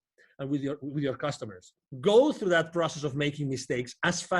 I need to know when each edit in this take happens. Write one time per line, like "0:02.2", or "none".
0:01.8